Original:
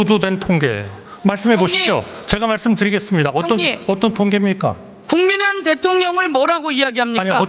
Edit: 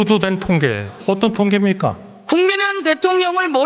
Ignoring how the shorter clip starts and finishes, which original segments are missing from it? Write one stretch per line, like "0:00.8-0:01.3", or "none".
0:00.9-0:03.7